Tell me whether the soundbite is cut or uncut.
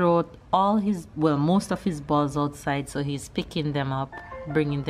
uncut